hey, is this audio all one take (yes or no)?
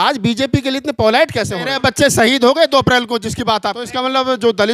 no